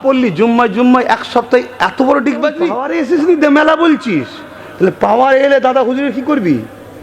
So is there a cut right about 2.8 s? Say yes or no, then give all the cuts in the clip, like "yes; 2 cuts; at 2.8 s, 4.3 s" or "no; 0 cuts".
yes; 1 cut; at 2.8 s